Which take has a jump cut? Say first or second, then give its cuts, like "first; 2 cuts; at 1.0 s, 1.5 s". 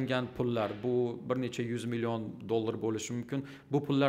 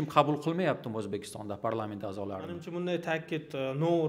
second; 1 cut; at 2.7 s